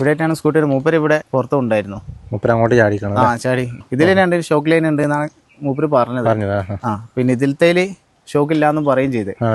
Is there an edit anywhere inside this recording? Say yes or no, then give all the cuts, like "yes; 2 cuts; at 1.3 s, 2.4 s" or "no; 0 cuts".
yes; 2 cuts; at 1.3 s, 3.8 s